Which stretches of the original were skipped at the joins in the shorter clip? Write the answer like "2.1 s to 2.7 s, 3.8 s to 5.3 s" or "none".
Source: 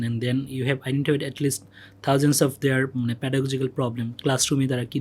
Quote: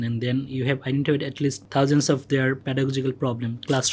1.6 s to 1.9 s, 2.9 s to 3.2 s